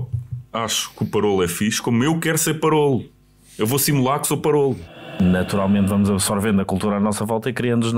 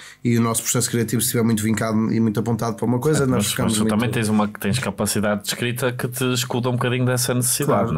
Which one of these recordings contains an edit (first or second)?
first